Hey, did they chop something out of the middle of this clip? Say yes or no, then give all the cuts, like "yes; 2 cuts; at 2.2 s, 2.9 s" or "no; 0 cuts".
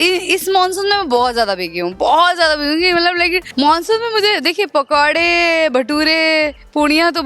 yes; 1 cut; at 3.5 s